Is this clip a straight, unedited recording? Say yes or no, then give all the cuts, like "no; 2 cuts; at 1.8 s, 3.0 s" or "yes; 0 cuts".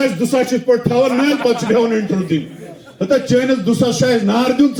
yes; 0 cuts